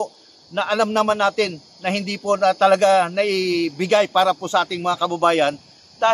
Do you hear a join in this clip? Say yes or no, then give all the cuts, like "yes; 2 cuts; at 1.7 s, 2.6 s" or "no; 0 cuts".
no; 0 cuts